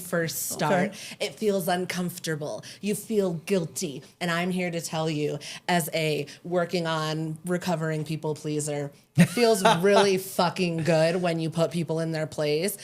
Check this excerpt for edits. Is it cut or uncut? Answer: cut